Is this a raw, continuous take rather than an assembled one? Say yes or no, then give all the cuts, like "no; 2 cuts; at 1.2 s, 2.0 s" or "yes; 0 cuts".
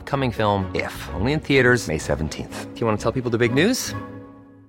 yes; 0 cuts